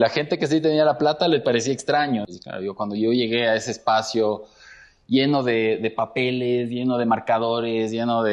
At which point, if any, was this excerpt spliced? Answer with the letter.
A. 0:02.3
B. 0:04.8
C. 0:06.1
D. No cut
A